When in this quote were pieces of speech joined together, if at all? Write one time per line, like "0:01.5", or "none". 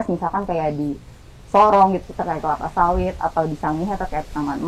none